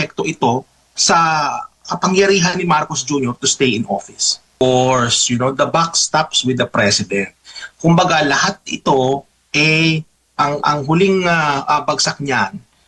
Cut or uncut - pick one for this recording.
cut